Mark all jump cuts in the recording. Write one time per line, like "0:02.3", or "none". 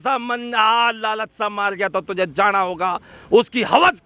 none